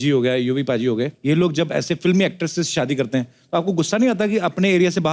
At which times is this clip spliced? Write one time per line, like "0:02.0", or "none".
0:01.1